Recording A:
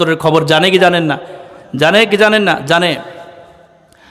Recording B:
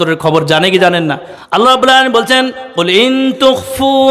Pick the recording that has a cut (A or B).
B